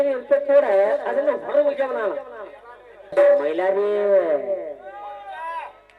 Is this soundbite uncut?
no; 1 cut; at 3.1 s

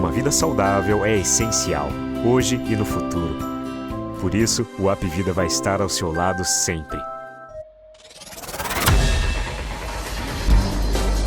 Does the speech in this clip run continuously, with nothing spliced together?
no; 1 cut; at 7.5 s

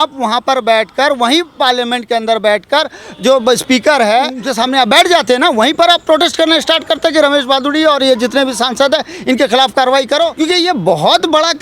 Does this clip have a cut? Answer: yes; 2 cuts; at 4.4 s, 10.3 s

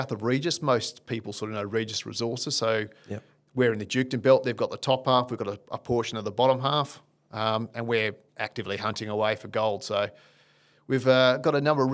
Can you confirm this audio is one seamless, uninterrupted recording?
yes; 0 cuts

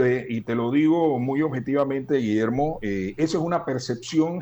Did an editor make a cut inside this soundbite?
no; 0 cuts

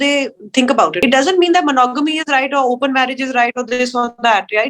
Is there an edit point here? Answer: yes; 1 cut; at 1.0 s

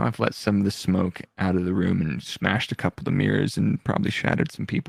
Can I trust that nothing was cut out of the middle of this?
yes; 0 cuts

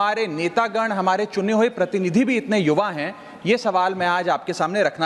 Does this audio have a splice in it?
no; 0 cuts

